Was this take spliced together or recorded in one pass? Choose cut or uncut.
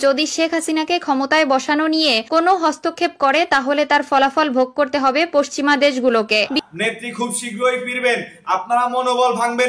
cut